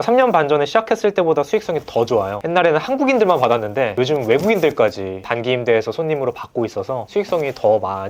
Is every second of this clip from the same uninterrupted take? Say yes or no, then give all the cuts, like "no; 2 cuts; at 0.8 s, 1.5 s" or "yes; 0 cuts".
no; 2 cuts; at 2.4 s, 7.0 s